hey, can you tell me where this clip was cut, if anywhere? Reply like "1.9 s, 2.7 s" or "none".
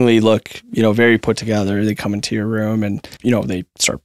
3.1 s